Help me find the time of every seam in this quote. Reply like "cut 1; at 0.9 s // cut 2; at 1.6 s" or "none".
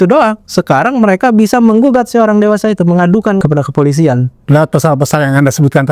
cut 1; at 3.4 s